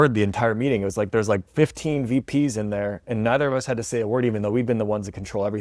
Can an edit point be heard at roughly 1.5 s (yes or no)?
no